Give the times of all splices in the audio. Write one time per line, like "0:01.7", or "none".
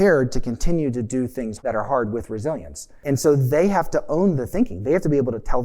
0:01.6
0:03.0